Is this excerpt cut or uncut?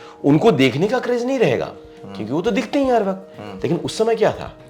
uncut